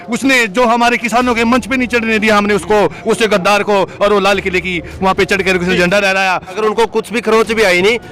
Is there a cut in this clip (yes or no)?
yes